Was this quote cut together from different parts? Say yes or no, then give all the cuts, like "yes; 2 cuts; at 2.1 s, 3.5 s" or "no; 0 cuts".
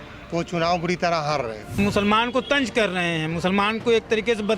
yes; 1 cut; at 1.7 s